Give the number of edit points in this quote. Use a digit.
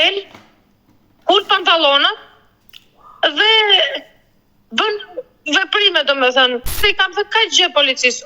1